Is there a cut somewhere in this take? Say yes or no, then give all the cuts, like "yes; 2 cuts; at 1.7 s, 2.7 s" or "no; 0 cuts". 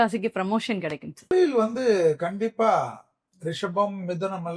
yes; 1 cut; at 1.3 s